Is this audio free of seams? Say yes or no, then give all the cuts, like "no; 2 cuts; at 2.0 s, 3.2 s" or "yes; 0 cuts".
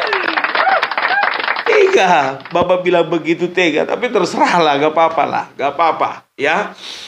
yes; 0 cuts